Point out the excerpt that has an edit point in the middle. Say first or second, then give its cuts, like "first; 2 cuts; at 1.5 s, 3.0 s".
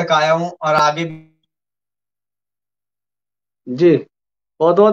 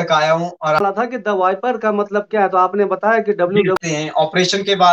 second; 2 cuts; at 0.8 s, 3.8 s